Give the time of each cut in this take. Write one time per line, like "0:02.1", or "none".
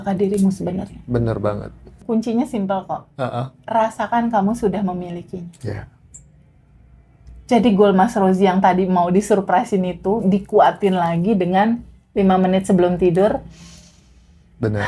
0:01.9